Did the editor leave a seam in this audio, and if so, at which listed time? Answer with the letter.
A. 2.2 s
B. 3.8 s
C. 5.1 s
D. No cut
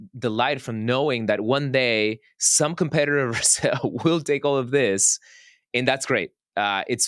D